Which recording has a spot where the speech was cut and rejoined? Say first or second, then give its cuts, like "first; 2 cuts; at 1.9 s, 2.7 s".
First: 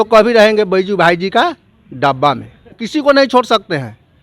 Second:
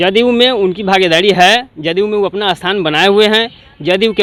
first; 1 cut; at 2.8 s